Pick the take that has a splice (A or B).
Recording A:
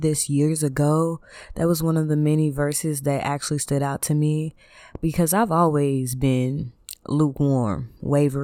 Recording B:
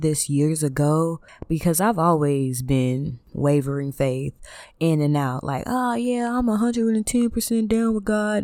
B